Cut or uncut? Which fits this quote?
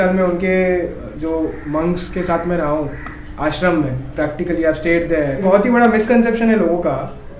cut